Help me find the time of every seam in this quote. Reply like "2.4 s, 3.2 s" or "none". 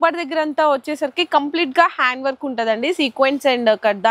none